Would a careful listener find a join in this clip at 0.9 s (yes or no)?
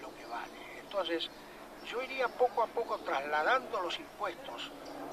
no